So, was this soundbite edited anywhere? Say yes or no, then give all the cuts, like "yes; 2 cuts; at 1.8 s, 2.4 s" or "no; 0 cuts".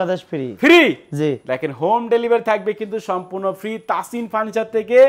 no; 0 cuts